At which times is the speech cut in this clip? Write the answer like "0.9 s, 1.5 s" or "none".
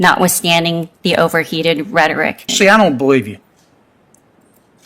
2.4 s